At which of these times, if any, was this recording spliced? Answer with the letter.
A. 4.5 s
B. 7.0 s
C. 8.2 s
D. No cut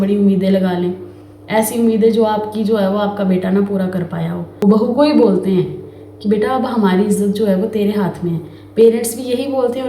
A